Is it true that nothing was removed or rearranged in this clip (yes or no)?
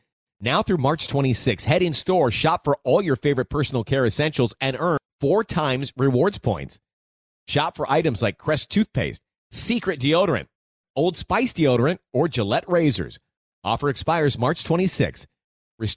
yes